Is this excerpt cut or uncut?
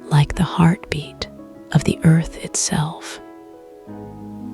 cut